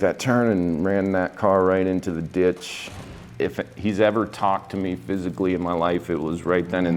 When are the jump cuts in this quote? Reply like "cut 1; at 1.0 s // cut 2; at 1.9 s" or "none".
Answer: cut 1; at 3.0 s